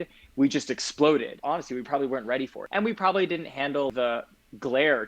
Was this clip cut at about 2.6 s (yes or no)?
yes